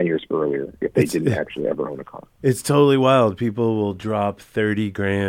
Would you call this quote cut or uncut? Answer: uncut